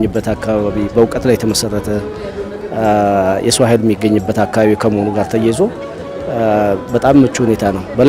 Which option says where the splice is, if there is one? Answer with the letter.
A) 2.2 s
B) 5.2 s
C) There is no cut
C